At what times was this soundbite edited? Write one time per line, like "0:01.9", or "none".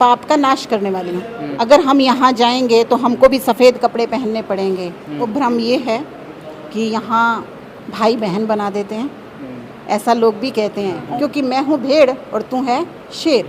0:01.4
0:05.2
0:11.1